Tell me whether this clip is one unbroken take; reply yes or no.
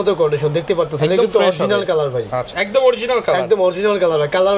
yes